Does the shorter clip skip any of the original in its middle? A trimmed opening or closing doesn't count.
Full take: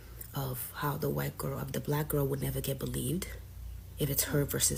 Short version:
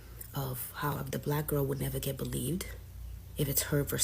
yes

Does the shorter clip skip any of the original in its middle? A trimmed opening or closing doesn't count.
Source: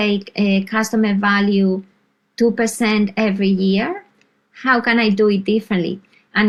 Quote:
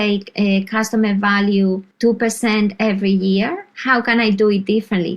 yes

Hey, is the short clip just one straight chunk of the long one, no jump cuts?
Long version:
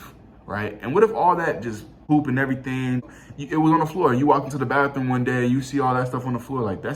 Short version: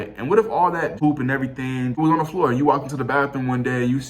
no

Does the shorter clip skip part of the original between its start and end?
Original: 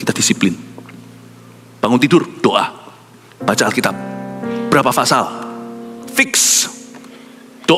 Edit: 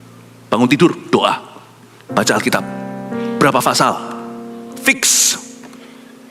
no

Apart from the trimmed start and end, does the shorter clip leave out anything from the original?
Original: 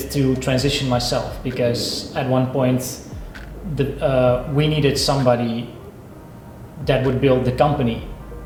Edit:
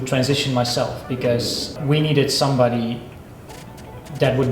yes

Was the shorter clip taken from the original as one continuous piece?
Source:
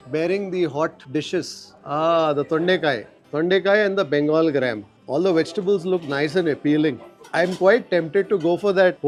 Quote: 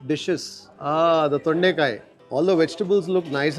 no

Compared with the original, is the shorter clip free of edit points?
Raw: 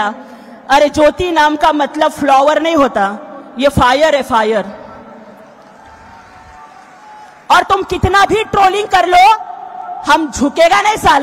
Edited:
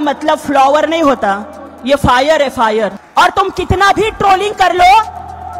no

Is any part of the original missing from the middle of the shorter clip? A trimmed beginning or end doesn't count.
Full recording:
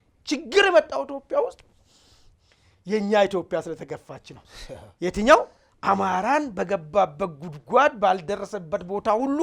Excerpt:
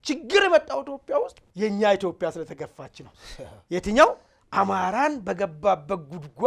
yes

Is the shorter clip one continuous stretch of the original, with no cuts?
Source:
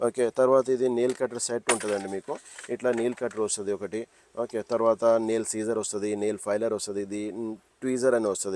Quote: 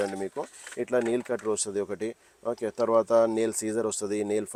yes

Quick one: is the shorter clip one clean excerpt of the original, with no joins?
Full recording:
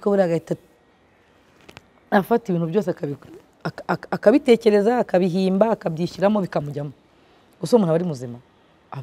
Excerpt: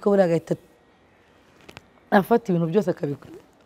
yes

